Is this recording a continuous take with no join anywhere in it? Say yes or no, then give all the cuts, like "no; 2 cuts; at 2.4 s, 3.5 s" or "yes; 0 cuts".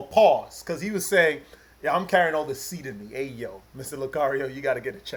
yes; 0 cuts